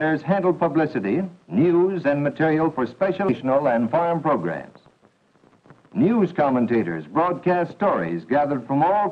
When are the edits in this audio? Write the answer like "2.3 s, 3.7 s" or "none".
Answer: none